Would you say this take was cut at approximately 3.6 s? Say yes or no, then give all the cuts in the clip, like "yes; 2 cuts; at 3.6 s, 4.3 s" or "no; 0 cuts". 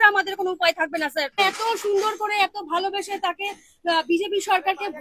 no; 1 cut; at 1.4 s